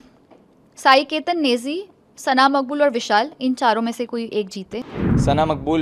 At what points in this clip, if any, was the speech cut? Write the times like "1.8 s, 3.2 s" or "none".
4.8 s